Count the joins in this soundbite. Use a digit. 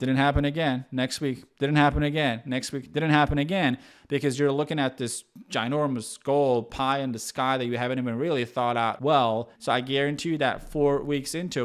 1